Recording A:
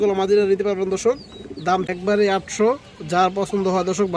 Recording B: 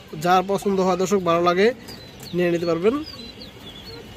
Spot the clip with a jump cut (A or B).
A